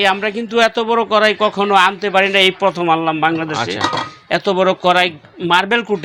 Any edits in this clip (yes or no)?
no